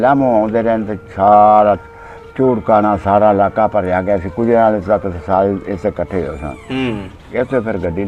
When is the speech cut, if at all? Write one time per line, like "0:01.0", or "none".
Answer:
none